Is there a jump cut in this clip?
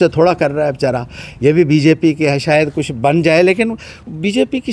no; 0 cuts

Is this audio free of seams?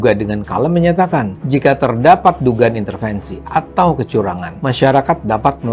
no; 2 cuts; at 1.4 s, 4.5 s

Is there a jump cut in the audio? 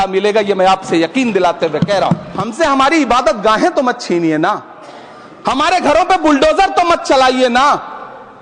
yes; 1 cut; at 2.4 s

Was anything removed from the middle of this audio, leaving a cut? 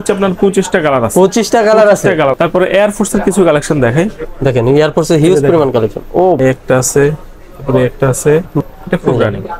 yes; 3 cuts; at 2.3 s, 6.4 s, 8.7 s

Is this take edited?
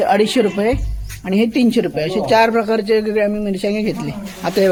no; 0 cuts

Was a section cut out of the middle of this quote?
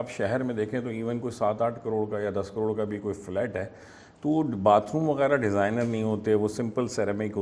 no; 0 cuts

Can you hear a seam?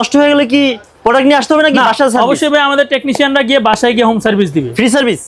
no; 0 cuts

